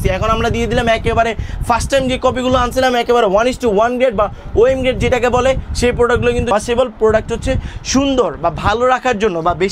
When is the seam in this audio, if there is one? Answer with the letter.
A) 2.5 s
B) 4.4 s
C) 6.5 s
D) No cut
C